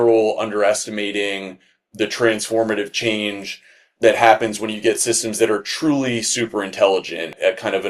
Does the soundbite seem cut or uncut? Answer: uncut